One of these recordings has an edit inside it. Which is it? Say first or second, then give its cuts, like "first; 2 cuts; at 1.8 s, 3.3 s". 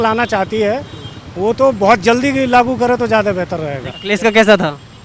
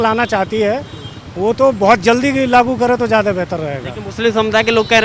first; 1 cut; at 3.9 s